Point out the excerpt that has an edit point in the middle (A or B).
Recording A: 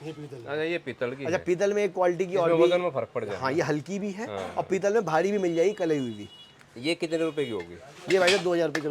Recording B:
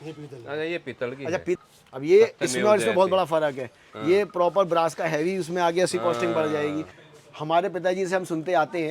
B